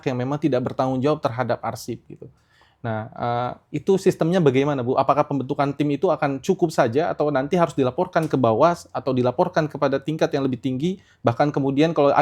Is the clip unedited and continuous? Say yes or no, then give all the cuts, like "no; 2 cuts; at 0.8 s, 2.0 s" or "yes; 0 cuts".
yes; 0 cuts